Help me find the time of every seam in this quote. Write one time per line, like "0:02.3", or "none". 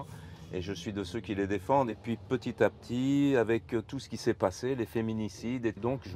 0:01.9